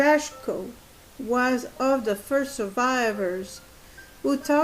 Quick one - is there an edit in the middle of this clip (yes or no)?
yes